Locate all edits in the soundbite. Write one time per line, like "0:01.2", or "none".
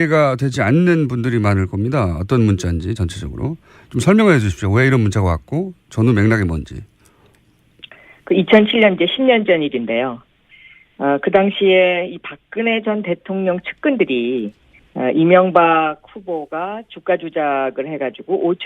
0:16.4